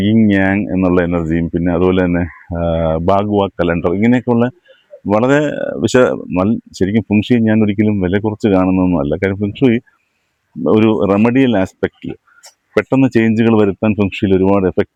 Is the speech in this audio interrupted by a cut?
no; 0 cuts

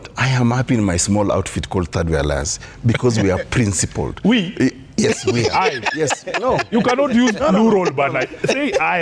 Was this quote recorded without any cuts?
yes; 0 cuts

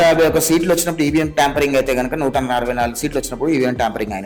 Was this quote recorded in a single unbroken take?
yes; 0 cuts

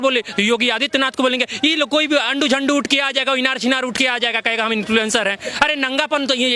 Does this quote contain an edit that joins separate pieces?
no; 0 cuts

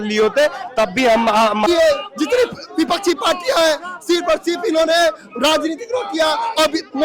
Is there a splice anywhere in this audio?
yes; 1 cut; at 1.7 s

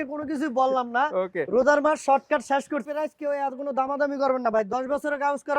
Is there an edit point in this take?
yes; 1 cut; at 2.8 s

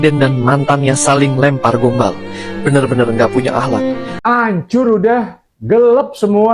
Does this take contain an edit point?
yes; 1 cut; at 4.1 s

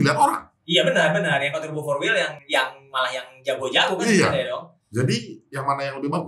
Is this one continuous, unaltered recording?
no; 2 cuts; at 2.4 s, 4.8 s

